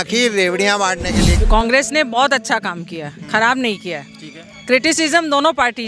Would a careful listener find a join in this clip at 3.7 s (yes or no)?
no